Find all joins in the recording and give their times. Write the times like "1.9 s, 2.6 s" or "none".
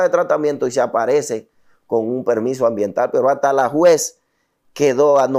none